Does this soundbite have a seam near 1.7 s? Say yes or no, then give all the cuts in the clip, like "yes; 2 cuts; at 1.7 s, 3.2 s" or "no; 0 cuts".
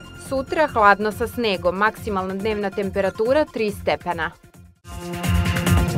no; 1 cut; at 5.0 s